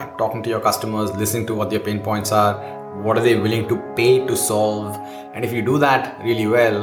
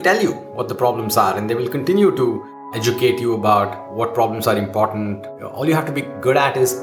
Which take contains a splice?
second; 2 cuts; at 2.7 s, 5.7 s

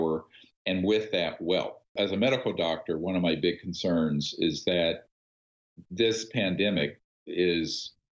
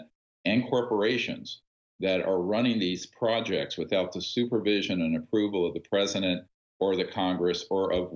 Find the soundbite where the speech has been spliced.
first; 1 cut; at 1.9 s

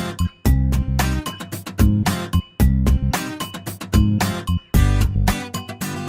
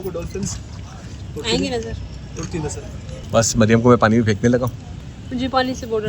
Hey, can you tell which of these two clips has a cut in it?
second; 2 cuts; at 3.2 s, 4.8 s

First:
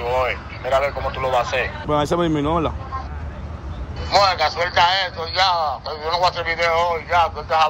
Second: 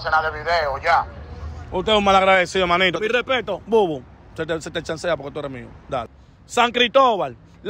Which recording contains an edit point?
second; 2 cuts; at 3.0 s, 6.2 s

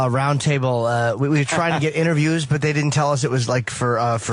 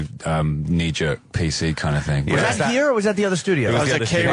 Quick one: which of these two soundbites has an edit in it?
second; 1 cut; at 3.3 s

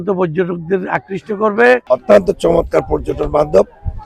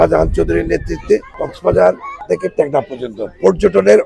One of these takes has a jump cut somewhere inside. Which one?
first; 1 cut; at 1.8 s

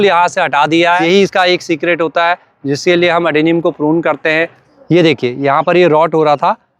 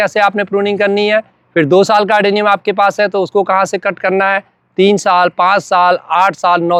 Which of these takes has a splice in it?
first; 2 cuts; at 1.0 s, 4.6 s

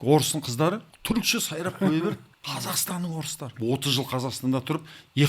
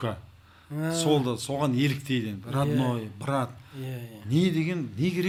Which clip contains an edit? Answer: first; 3 cuts; at 0.9 s, 2.3 s, 3.5 s

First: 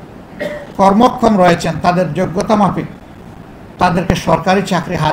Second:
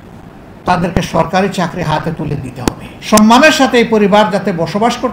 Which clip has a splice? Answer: second; 1 cut; at 2.9 s

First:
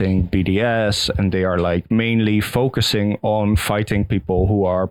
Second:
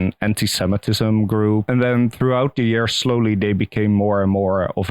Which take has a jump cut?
second; 1 cut; at 1.7 s

